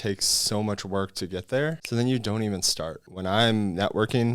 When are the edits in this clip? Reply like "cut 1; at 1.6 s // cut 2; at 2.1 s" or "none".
cut 1; at 1.8 s // cut 2; at 3.0 s

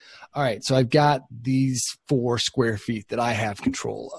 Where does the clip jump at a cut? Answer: none

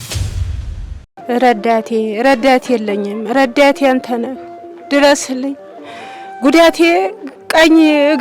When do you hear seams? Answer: cut 1; at 1.0 s

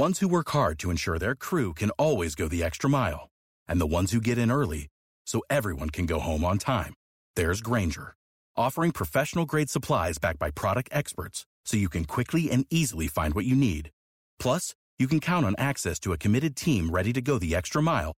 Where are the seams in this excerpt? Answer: none

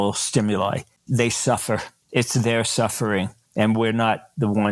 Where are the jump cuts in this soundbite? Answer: cut 1; at 0.9 s // cut 2; at 2.0 s // cut 3; at 3.4 s

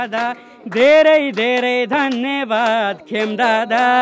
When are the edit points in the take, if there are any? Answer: none

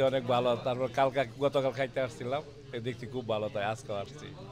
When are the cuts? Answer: none

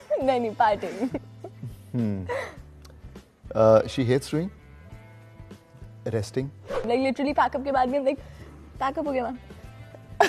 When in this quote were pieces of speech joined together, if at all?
cut 1; at 6.8 s

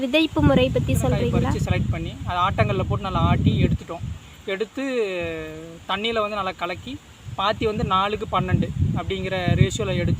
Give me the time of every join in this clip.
cut 1; at 1.6 s

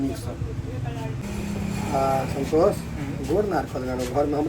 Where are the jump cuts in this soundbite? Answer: cut 1; at 1.3 s

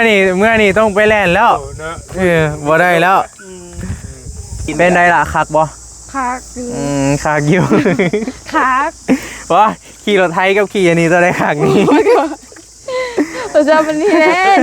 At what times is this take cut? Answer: cut 1; at 4.7 s

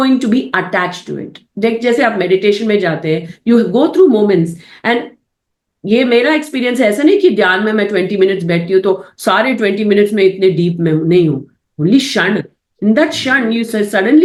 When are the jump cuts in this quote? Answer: none

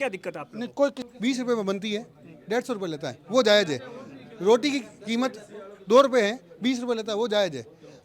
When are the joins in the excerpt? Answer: cut 1; at 1.0 s

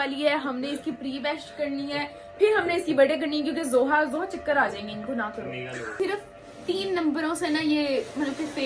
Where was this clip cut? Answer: cut 1; at 6.0 s

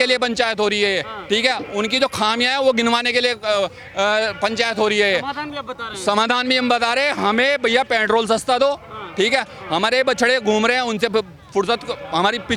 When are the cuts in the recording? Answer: none

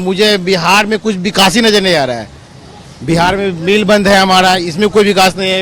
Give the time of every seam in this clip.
none

